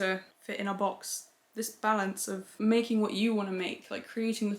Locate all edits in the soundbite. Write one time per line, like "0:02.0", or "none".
0:01.5